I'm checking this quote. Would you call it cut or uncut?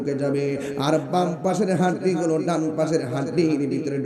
uncut